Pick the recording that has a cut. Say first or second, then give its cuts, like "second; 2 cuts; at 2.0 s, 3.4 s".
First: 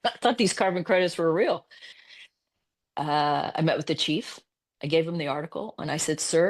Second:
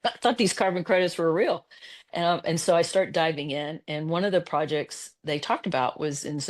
first; 1 cut; at 2.0 s